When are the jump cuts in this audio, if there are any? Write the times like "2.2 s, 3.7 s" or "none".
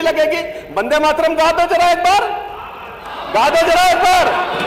none